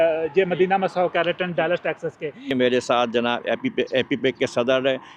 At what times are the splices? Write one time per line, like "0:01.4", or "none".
0:02.5